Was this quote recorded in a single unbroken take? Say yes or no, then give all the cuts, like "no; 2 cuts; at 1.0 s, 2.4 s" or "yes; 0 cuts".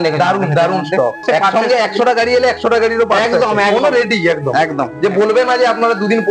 no; 1 cut; at 1.2 s